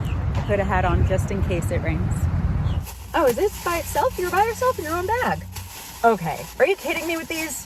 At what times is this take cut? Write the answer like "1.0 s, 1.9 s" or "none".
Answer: 2.8 s, 5.6 s